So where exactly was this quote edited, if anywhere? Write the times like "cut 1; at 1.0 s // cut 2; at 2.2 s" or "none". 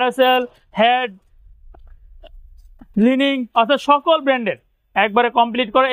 none